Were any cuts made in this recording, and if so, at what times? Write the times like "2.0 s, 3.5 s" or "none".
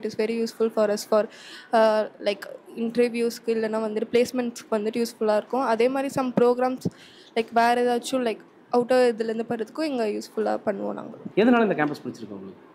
none